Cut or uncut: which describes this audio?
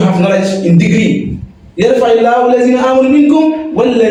uncut